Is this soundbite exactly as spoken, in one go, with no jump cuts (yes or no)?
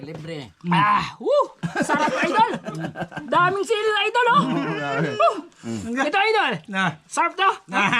yes